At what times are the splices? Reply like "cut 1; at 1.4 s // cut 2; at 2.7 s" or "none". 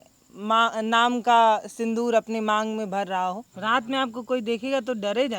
cut 1; at 3.5 s